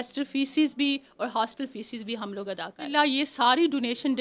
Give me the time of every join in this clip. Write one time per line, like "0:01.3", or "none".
0:02.9